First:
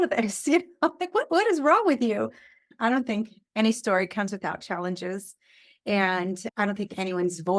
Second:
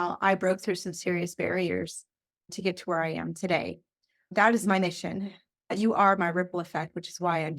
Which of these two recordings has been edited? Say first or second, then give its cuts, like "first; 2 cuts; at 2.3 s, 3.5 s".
first; 1 cut; at 2.7 s